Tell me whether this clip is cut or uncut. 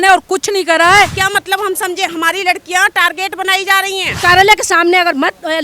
cut